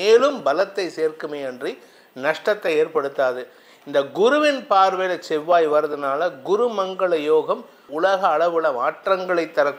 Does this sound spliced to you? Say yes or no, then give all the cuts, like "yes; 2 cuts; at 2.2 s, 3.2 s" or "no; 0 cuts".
yes; 1 cut; at 7.8 s